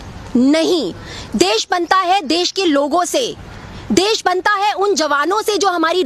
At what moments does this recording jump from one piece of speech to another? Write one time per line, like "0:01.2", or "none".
none